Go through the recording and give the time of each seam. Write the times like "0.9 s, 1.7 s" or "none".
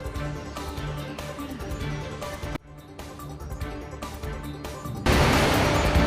5.0 s